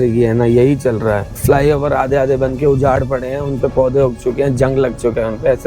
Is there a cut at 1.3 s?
yes; 1 cut; at 1.3 s

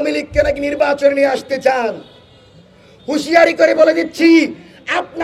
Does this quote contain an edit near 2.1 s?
no; 0 cuts

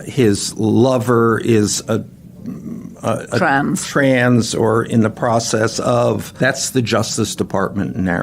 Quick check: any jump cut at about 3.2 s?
no; 1 cut; at 6.3 s

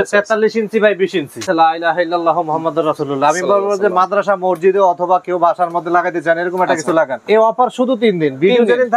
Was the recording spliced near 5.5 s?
no; 2 cuts; at 1.4 s, 7.2 s

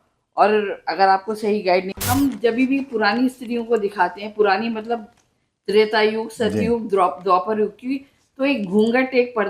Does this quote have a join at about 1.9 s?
yes; 1 cut; at 1.9 s

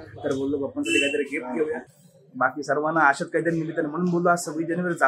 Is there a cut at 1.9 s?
yes; 1 cut; at 1.9 s

